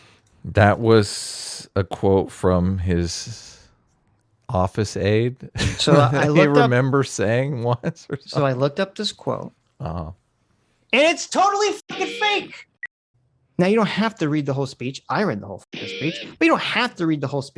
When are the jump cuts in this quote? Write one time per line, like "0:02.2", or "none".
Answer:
0:12.7